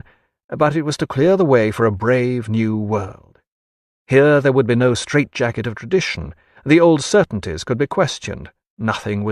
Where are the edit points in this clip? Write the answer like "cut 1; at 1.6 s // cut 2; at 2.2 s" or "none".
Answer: none